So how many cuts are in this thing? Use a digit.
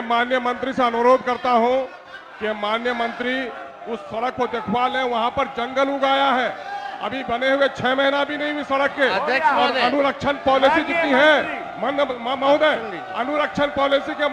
0